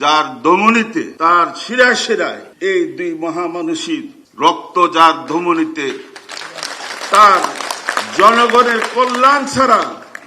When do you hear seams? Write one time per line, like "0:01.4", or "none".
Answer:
0:01.1
0:02.4
0:04.2